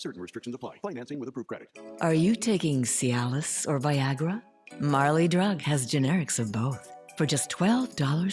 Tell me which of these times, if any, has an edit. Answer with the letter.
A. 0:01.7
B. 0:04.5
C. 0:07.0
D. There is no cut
A